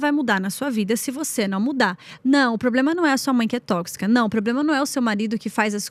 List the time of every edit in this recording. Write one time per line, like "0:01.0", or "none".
none